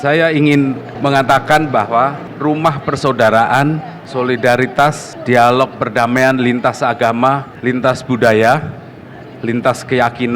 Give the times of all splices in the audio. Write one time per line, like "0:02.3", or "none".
0:00.9
0:02.3
0:04.0
0:05.1
0:07.5

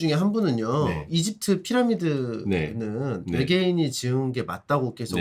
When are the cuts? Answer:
0:01.1

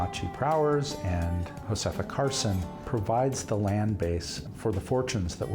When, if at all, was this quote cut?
0:01.5
0:02.7
0:04.4

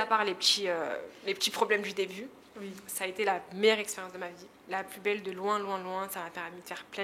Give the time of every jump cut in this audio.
none

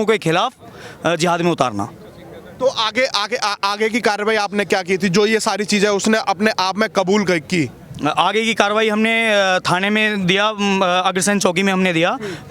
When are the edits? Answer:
none

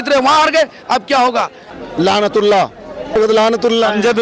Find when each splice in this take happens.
0:01.7
0:03.3

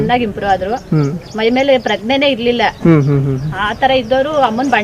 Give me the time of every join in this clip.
none

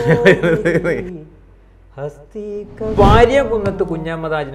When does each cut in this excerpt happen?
0:02.9

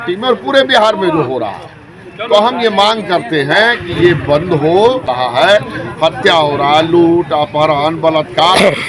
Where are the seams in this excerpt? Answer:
0:05.1

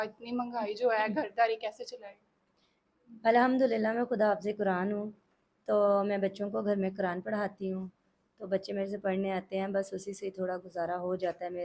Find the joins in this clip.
none

